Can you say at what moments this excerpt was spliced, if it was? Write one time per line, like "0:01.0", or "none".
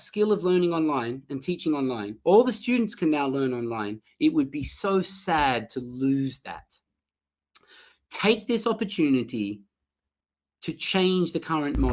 none